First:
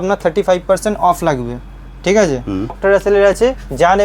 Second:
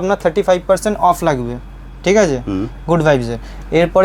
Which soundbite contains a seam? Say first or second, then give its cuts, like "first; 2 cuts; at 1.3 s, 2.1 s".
first; 1 cut; at 2.8 s